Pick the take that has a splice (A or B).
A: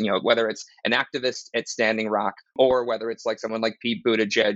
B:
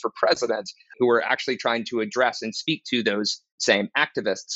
A